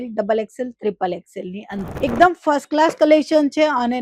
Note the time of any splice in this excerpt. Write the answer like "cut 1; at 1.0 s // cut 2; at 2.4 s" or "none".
cut 1; at 1.9 s